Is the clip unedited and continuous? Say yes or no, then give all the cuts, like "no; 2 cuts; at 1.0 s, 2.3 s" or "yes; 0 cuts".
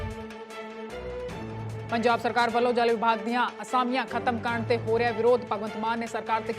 no; 1 cut; at 1.9 s